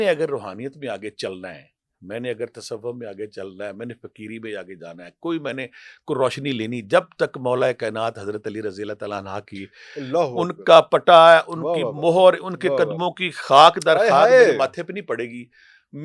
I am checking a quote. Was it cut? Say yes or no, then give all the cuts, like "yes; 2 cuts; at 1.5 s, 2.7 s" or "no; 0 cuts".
no; 0 cuts